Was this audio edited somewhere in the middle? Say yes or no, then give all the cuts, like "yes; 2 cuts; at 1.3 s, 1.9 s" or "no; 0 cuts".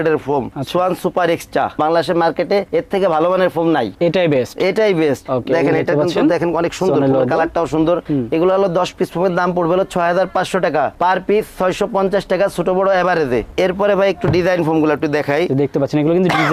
no; 0 cuts